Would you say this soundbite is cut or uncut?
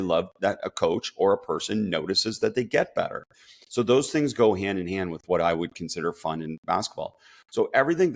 uncut